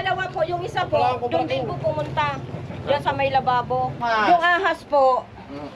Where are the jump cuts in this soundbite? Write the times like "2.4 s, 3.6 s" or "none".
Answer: 4.0 s